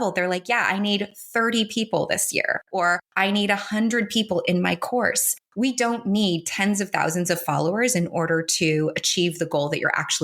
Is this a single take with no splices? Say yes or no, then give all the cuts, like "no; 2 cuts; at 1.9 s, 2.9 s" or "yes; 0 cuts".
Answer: yes; 0 cuts